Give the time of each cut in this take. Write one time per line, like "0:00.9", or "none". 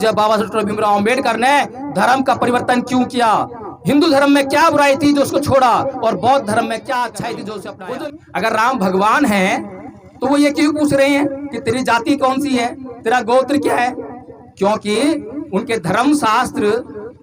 0:07.8